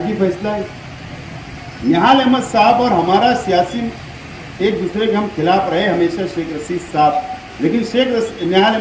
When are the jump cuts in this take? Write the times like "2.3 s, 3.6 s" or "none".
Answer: none